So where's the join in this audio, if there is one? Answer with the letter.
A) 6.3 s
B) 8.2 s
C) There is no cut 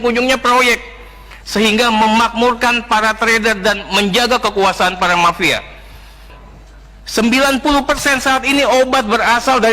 A